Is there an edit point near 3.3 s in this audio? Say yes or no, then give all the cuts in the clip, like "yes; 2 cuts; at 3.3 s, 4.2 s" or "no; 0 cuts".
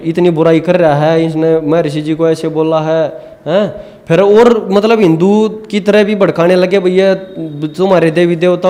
no; 0 cuts